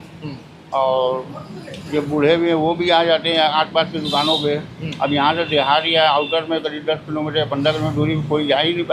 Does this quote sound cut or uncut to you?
uncut